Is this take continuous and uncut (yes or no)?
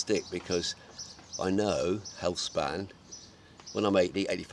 yes